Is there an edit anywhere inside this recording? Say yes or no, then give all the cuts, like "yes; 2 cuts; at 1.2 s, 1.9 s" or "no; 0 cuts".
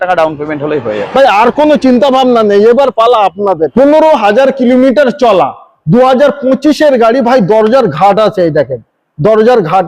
yes; 1 cut; at 3.7 s